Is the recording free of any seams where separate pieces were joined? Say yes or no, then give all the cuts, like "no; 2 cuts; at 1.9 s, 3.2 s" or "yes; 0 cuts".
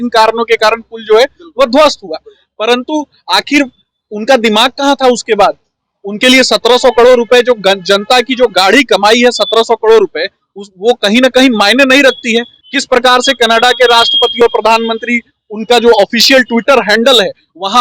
no; 1 cut; at 12.6 s